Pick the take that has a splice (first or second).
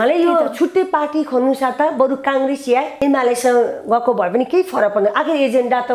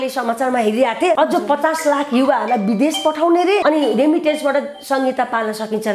second